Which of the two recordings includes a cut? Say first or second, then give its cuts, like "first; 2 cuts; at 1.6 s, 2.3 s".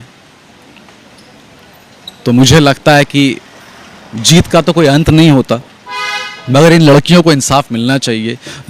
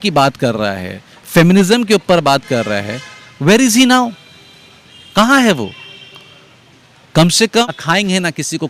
second; 1 cut; at 7.6 s